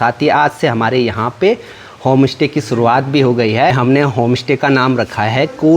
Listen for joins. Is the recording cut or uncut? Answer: uncut